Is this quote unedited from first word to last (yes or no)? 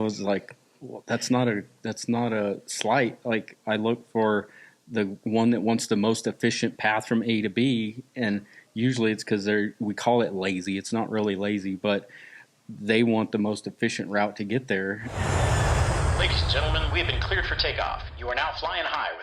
no